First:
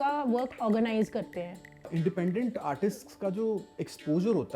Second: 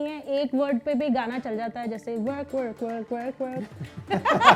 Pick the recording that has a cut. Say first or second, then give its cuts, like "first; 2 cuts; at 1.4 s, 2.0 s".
first; 1 cut; at 1.9 s